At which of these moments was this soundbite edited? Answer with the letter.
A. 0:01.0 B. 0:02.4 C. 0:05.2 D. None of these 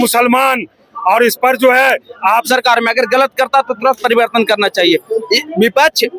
B